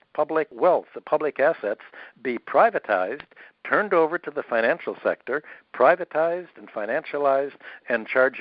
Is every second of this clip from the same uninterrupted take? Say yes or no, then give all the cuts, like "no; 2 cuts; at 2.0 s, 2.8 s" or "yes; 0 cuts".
yes; 0 cuts